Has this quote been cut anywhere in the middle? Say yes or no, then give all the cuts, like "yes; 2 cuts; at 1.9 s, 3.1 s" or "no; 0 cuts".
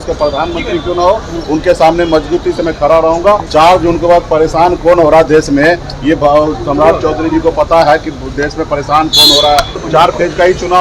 yes; 2 cuts; at 3.5 s, 9.8 s